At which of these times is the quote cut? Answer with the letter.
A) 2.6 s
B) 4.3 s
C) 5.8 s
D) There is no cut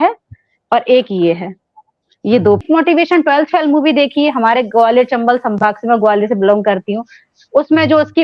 A